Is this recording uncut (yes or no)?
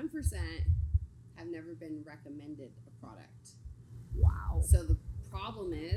yes